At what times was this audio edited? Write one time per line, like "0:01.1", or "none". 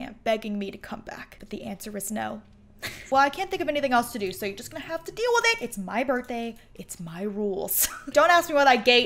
0:03.0
0:08.1